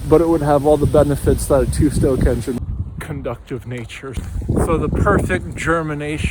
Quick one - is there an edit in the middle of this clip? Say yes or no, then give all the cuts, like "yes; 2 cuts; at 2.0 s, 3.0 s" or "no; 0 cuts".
yes; 2 cuts; at 2.6 s, 4.2 s